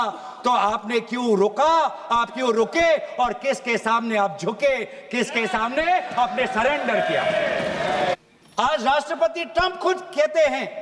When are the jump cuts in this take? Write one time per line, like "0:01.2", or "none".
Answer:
0:08.1